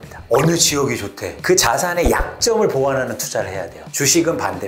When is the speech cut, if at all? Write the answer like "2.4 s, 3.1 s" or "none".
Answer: 1.3 s, 3.8 s